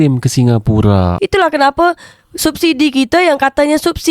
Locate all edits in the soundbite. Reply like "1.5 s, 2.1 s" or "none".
1.1 s